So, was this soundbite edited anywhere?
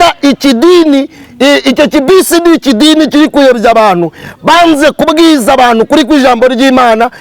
no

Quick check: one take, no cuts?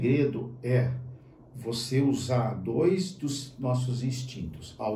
yes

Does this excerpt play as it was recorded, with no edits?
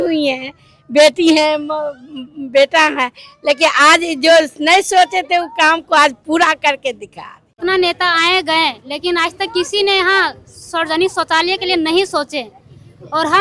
no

